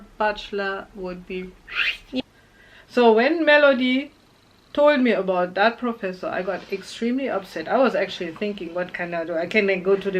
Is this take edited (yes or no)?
yes